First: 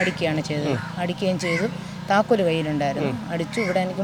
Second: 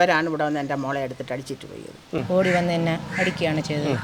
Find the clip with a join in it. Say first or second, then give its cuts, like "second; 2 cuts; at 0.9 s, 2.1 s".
second; 1 cut; at 2.2 s